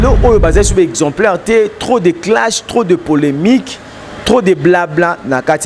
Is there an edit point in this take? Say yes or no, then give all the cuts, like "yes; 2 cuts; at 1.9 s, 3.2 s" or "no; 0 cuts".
no; 0 cuts